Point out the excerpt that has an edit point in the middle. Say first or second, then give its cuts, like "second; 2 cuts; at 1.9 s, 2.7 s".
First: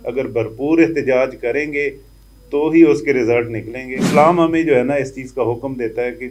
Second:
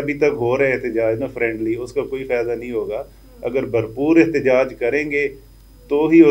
first; 1 cut; at 4.0 s